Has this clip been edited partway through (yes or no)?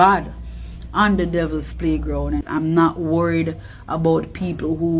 yes